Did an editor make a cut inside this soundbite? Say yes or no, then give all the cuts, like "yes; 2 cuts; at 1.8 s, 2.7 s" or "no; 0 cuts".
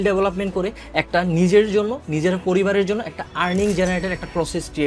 no; 0 cuts